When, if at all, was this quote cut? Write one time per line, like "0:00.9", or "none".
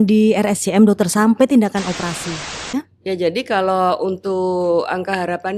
0:02.7

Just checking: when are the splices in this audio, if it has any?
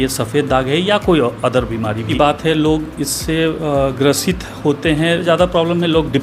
0:02.1
0:05.2

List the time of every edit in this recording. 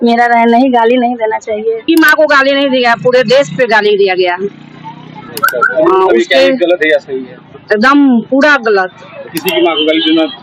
0:01.8

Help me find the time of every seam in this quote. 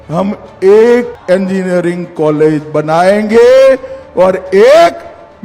0:01.1

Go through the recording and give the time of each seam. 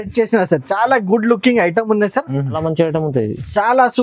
0:02.6

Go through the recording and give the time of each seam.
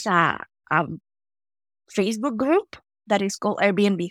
none

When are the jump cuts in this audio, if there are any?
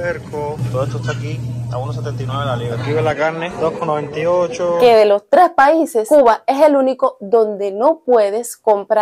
0:04.8

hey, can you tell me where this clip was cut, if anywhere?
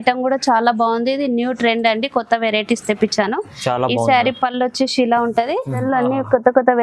0:05.8

